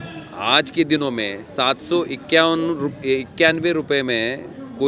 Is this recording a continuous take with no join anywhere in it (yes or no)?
yes